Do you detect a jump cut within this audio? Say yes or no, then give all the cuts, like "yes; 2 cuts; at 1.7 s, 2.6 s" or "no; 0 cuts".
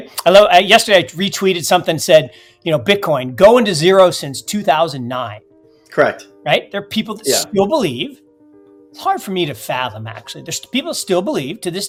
no; 0 cuts